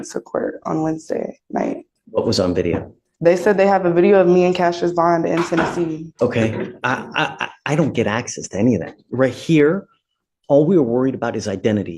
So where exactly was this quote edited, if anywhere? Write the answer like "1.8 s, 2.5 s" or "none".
1.9 s, 6.1 s